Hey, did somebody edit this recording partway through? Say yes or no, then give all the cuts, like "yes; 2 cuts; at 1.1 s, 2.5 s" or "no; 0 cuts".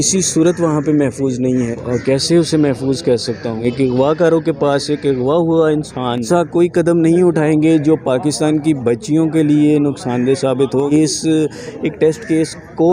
yes; 4 cuts; at 1.7 s, 3.6 s, 6.2 s, 10.9 s